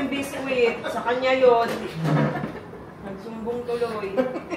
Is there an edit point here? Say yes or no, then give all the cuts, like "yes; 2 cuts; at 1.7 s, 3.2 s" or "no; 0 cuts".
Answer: no; 0 cuts